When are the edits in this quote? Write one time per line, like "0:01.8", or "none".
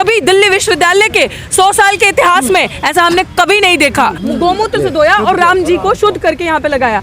0:04.2